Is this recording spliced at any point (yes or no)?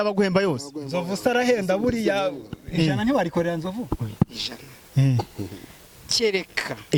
no